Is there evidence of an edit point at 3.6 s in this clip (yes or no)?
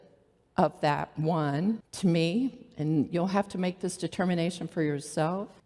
no